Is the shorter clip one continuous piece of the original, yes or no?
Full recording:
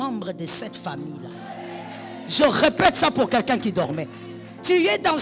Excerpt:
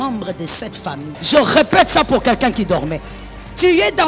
no